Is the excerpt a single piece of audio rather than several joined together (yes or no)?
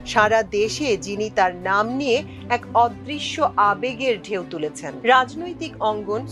no